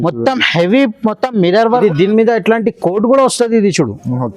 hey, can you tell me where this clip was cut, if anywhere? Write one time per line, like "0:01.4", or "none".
0:01.7